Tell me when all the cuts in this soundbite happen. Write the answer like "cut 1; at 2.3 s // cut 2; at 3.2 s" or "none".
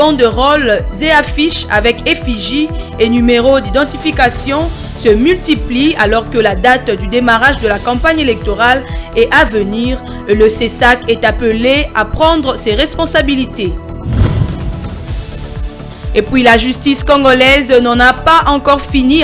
cut 1; at 16.1 s